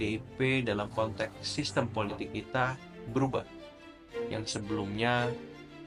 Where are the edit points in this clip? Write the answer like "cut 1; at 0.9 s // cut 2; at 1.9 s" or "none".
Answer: none